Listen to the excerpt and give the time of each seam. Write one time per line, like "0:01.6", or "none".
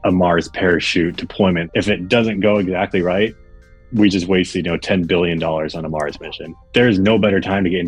0:01.6
0:06.6